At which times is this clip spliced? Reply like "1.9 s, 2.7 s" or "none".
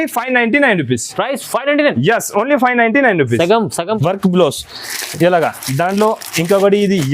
4.0 s